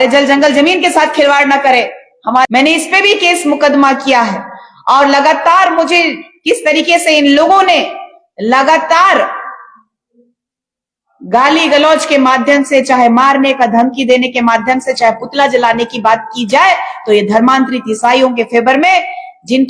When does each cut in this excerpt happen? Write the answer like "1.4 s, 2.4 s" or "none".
2.5 s